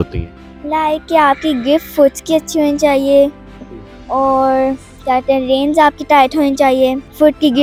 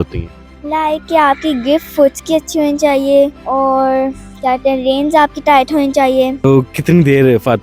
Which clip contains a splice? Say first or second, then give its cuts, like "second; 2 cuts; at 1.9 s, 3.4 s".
second; 2 cuts; at 3.4 s, 6.4 s